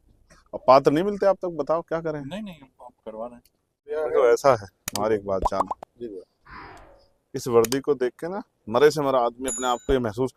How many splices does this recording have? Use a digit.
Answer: 1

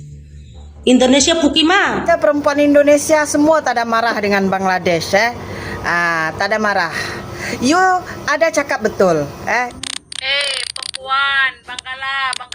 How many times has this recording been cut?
2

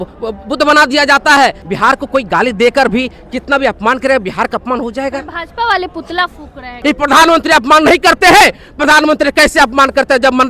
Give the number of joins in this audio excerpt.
2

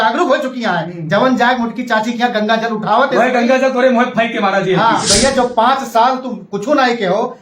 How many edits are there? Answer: 1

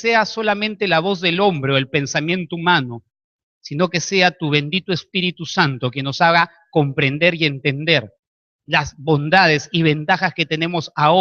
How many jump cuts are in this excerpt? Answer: 1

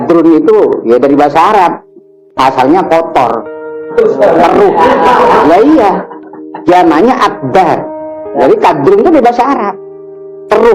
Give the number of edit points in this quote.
0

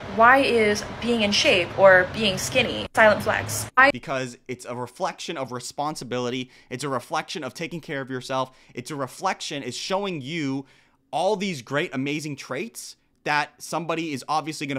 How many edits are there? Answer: 0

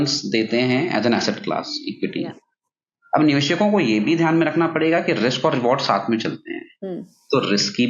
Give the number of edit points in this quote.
0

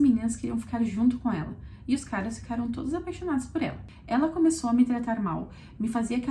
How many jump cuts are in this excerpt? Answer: 1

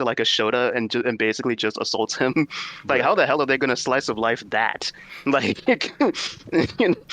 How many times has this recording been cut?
0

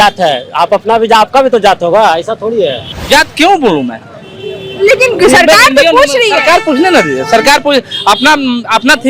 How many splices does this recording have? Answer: 1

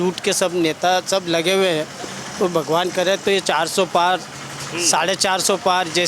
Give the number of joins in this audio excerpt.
0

